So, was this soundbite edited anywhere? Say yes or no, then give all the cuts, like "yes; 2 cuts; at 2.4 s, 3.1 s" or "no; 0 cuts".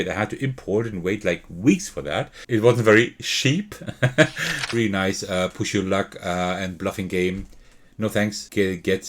yes; 1 cut; at 4.5 s